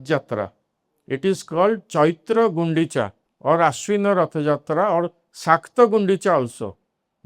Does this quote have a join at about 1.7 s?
no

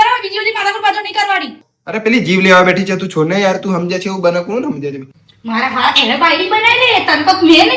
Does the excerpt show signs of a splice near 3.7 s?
no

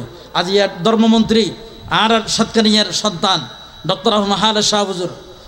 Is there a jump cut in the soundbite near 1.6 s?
no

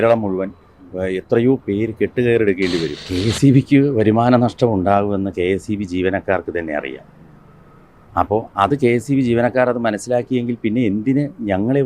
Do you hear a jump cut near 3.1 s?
yes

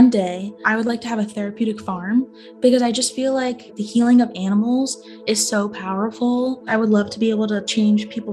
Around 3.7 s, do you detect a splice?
yes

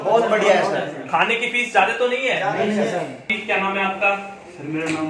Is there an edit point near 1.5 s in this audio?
no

